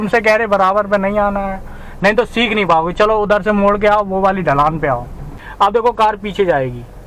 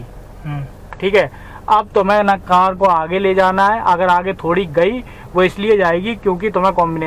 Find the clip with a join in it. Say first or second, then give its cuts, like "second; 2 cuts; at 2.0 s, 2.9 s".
first; 1 cut; at 5.4 s